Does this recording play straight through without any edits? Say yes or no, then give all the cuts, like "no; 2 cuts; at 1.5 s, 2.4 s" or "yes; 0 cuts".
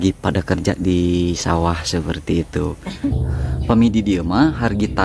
no; 1 cut; at 3.2 s